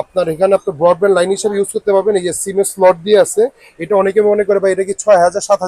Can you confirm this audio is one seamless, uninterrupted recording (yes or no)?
yes